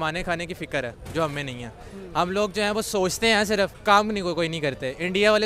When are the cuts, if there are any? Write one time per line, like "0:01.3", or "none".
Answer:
0:03.8